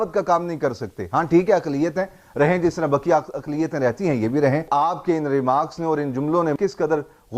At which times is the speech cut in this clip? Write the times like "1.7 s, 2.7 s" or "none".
4.6 s, 6.6 s